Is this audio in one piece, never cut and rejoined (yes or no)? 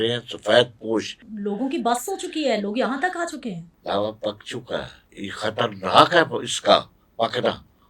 no